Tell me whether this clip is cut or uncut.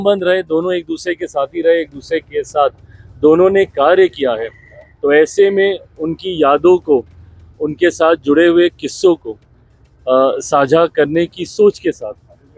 uncut